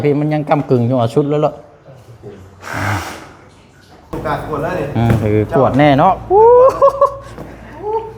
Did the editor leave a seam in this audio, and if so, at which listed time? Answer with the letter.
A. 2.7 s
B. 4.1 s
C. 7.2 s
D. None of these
B